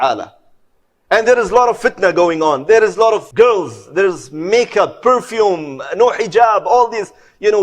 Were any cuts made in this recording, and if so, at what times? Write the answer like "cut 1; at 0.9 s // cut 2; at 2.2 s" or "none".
cut 1; at 3.3 s